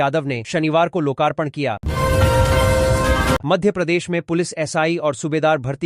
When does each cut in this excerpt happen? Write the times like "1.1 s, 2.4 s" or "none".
none